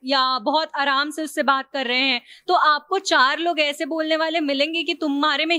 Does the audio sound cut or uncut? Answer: uncut